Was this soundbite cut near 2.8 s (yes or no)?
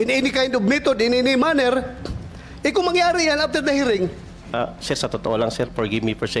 no